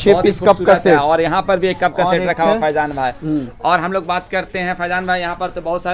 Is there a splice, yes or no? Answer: no